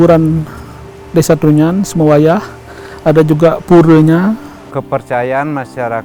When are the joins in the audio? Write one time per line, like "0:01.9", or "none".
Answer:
0:04.6

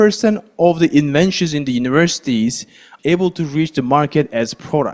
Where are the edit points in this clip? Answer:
0:02.9

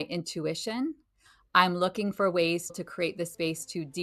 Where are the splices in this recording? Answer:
0:02.8

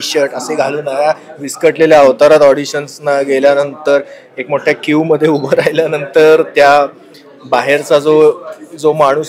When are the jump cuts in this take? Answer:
none

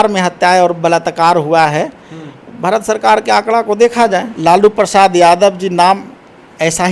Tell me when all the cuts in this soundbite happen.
0:04.3

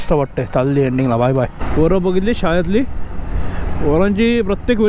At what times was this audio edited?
0:01.6

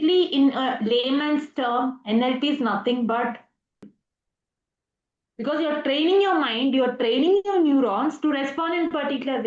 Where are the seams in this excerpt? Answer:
0:03.8

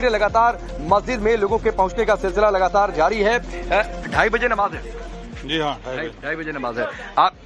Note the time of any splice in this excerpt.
none

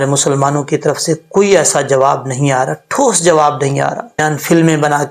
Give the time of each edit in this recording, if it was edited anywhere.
0:04.2

